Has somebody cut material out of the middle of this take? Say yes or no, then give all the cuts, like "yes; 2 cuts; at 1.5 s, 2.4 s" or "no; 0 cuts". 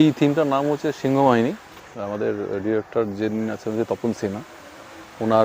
yes; 1 cut; at 1.8 s